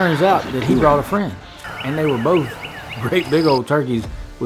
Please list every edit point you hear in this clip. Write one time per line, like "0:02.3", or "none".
none

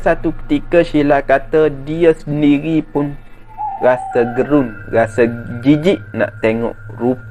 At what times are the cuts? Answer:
none

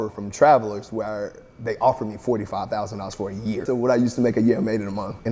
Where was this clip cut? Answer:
none

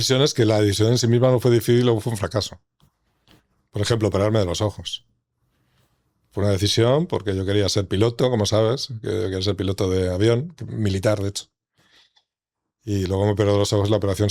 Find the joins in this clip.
none

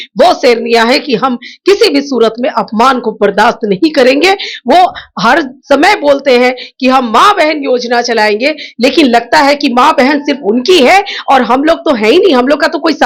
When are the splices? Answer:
none

